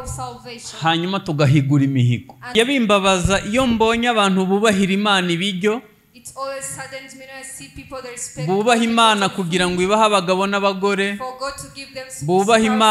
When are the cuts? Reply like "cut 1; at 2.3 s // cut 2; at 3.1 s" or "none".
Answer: cut 1; at 2.5 s